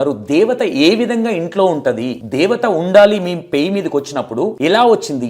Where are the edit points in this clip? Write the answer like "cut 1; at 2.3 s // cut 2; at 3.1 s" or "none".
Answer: cut 1; at 2.2 s // cut 2; at 4.6 s